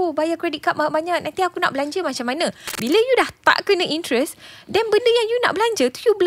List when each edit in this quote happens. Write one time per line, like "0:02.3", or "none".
0:02.7